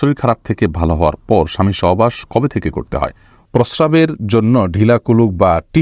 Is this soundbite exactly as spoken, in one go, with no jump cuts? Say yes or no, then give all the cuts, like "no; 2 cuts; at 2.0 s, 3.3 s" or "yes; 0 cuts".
no; 1 cut; at 3.5 s